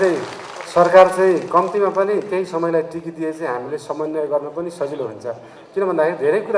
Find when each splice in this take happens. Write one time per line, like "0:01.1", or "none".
none